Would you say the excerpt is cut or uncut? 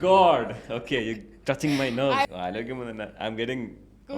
cut